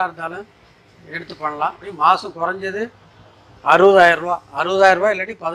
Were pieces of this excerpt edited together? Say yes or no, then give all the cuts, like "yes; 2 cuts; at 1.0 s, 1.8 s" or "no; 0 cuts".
yes; 1 cut; at 1.8 s